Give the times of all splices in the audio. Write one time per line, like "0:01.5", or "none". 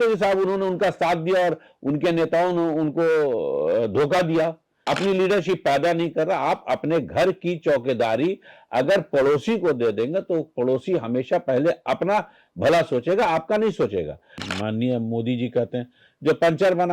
0:04.7
0:14.4